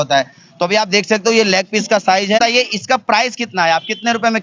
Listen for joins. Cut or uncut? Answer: cut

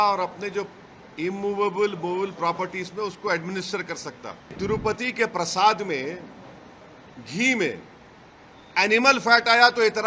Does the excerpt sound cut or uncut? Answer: cut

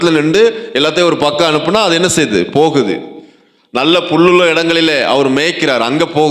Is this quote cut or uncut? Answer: uncut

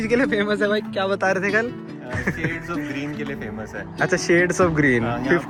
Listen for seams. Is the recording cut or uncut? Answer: uncut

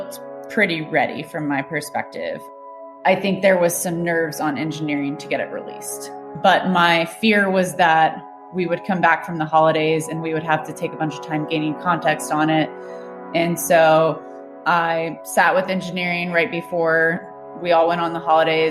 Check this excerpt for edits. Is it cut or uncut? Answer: uncut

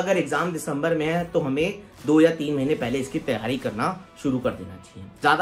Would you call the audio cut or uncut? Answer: uncut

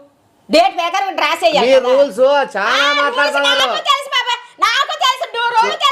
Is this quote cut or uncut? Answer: uncut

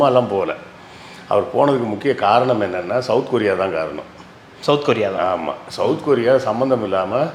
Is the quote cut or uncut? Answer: uncut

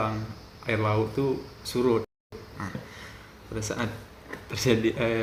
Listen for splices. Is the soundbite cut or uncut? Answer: uncut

